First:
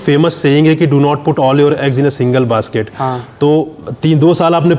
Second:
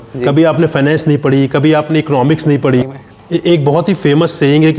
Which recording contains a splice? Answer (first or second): second